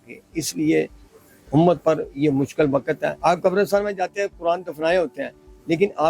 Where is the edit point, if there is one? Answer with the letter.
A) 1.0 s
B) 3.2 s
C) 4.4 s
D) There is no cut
B